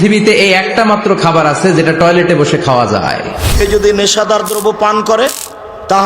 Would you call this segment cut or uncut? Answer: cut